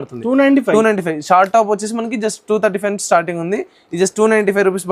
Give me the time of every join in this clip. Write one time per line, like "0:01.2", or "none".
none